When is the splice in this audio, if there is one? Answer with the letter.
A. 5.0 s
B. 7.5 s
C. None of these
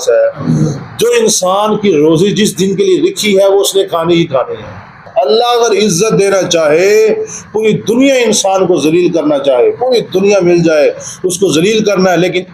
A